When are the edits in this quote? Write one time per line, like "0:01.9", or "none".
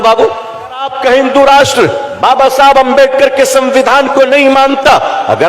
0:00.9